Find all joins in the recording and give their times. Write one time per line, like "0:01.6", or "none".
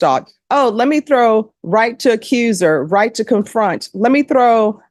none